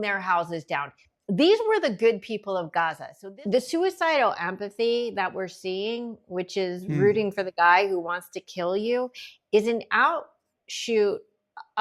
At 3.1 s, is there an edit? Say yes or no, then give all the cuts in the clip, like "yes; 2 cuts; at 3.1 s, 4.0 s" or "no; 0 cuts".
yes; 1 cut; at 3.1 s